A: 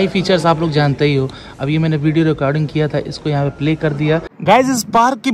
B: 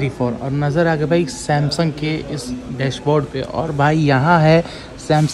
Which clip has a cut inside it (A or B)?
A